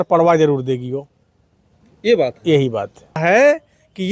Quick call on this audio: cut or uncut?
cut